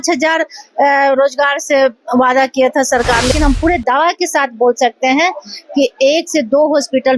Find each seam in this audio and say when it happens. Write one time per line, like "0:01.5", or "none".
0:03.3